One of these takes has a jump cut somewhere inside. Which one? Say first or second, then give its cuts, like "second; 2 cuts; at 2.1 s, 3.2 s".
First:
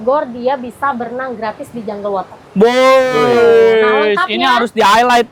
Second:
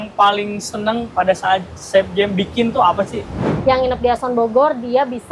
second; 1 cut; at 3.5 s